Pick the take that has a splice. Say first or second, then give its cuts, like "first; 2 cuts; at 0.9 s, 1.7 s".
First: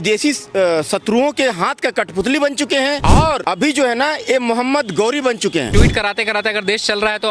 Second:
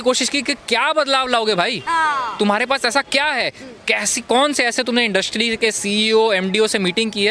first; 2 cuts; at 3.2 s, 5.7 s